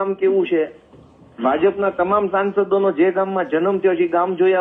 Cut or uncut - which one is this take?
uncut